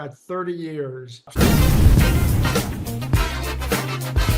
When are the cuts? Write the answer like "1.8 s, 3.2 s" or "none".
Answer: 1.3 s